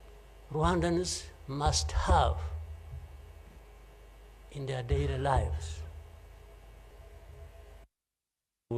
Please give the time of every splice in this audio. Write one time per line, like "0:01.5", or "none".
0:06.9